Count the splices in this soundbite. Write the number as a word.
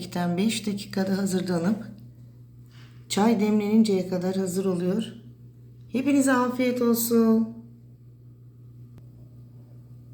one